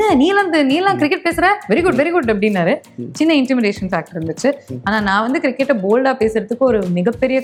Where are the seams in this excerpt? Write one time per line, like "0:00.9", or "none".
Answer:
none